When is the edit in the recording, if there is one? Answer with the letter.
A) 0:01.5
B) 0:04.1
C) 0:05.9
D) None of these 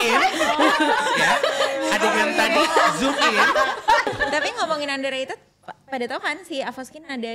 B